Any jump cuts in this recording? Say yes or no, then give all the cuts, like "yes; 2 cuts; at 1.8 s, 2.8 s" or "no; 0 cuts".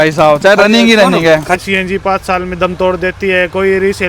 yes; 1 cut; at 1.6 s